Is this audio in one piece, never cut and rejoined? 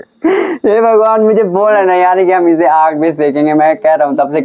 yes; 0 cuts

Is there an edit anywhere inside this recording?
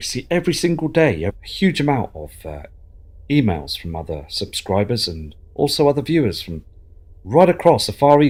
no; 0 cuts

